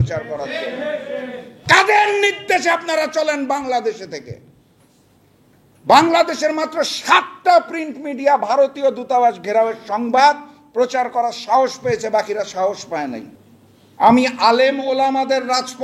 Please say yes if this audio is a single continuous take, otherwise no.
no